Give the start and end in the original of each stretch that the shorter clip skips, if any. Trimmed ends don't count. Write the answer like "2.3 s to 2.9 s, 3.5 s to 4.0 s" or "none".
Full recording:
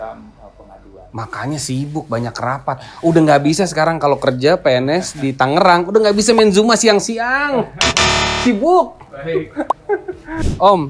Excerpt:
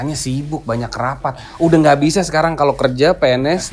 none